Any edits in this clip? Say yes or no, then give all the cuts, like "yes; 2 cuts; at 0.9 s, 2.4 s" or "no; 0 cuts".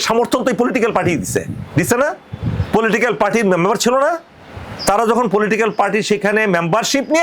no; 0 cuts